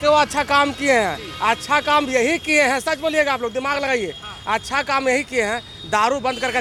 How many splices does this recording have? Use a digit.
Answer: 0